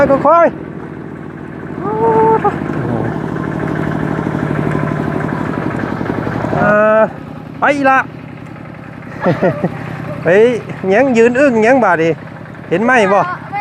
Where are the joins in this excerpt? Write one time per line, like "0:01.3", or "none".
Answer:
0:06.6